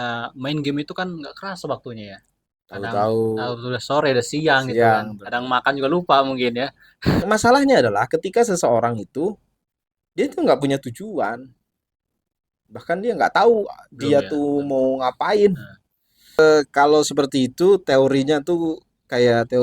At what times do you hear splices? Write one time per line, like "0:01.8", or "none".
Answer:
0:07.2
0:16.4